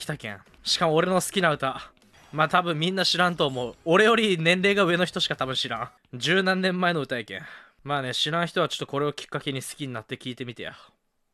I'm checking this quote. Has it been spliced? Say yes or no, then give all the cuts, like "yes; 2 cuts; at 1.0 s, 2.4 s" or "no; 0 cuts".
no; 0 cuts